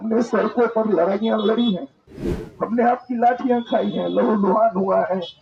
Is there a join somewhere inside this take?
no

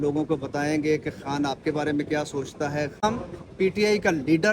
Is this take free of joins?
no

